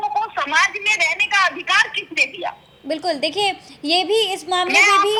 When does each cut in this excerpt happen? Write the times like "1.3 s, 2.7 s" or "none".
none

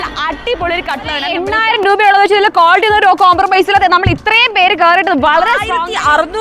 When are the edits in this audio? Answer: 1.6 s, 5.4 s

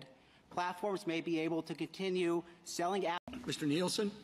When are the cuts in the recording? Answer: 3.2 s

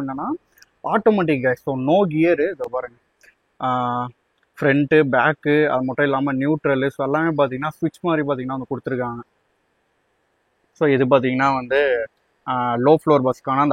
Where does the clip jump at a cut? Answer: none

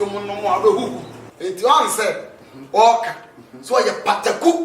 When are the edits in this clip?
1.2 s

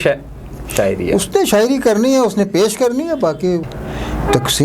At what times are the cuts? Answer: 3.7 s

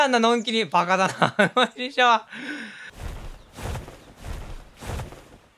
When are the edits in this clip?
none

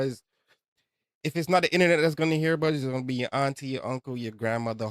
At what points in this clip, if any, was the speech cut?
none

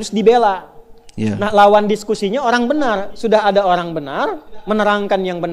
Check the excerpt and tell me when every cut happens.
none

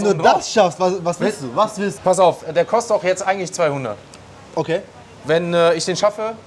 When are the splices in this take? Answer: 1.9 s

